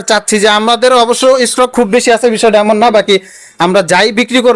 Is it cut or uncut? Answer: uncut